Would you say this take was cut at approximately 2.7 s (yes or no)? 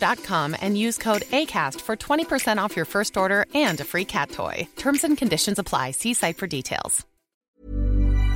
no